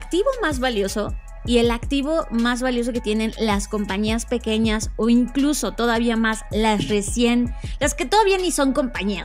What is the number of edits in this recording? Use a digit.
0